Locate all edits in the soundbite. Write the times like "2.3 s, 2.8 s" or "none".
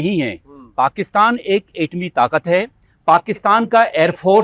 none

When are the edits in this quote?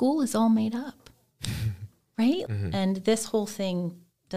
2.4 s

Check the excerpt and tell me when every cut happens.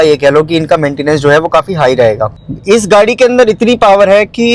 2.3 s

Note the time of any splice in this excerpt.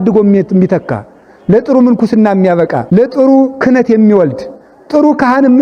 2.8 s

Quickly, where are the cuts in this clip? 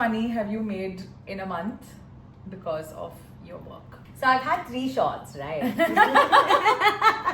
none

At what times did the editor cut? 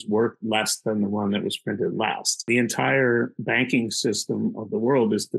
2.5 s

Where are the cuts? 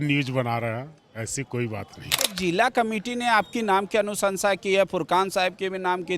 2.3 s

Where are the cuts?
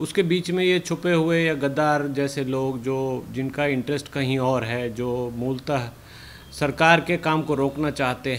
none

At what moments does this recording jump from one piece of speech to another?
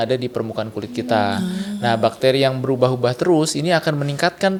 none

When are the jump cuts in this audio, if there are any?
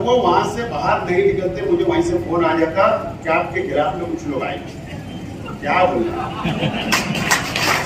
none

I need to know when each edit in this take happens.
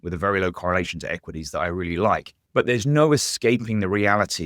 2.4 s

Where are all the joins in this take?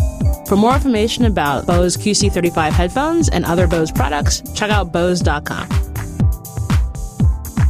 6.1 s

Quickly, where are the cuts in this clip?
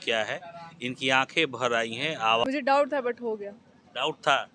2.4 s

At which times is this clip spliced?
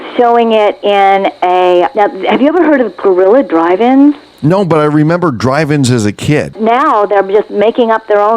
1.9 s, 4.3 s, 6.5 s

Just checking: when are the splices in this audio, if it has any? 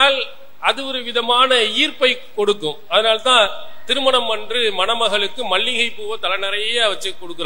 none

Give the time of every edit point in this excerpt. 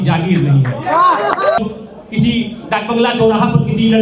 1.6 s

